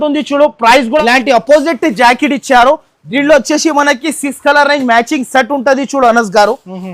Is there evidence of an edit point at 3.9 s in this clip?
no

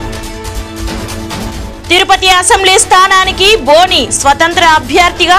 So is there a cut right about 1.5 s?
yes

